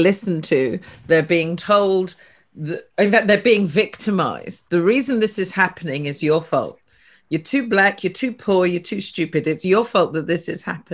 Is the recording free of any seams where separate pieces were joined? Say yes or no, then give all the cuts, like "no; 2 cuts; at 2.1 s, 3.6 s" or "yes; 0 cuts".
yes; 0 cuts